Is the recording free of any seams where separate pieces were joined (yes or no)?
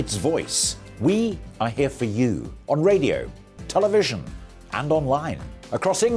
yes